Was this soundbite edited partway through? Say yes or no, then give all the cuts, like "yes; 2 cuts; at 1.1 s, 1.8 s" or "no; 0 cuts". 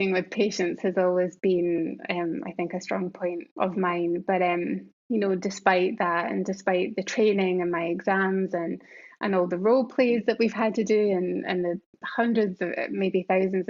yes; 2 cuts; at 3.5 s, 4.9 s